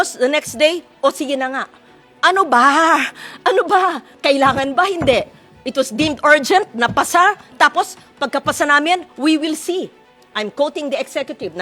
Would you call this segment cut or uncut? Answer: uncut